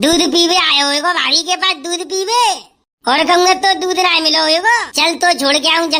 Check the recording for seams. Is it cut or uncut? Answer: cut